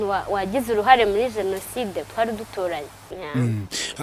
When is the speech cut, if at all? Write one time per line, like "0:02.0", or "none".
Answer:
0:03.1